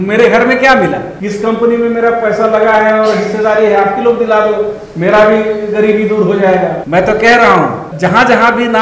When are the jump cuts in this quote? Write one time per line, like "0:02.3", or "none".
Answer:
0:01.1
0:06.8
0:07.9